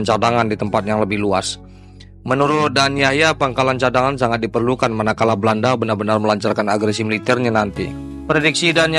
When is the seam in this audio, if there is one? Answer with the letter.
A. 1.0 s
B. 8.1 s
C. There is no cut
B